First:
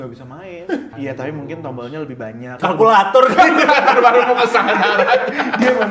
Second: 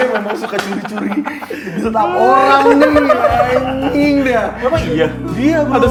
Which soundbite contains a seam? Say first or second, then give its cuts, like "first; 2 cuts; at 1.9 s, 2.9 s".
first; 2 cuts; at 0.9 s, 2.6 s